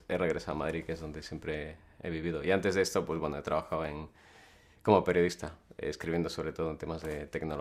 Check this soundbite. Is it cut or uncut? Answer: cut